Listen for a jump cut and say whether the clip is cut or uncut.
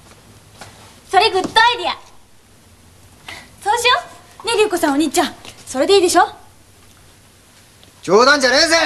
uncut